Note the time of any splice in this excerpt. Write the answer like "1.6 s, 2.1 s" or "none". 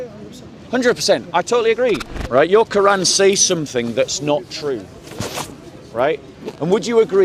2.1 s